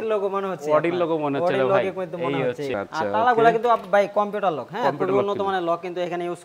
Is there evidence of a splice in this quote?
no; 0 cuts

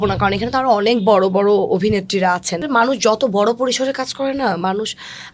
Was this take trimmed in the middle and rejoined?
yes; 1 cut; at 2.6 s

